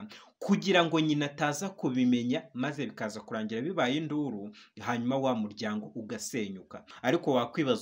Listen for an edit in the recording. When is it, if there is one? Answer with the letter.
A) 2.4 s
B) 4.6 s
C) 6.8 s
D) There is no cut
C